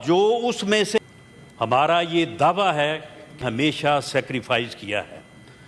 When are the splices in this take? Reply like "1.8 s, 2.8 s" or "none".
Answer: 1.0 s, 3.4 s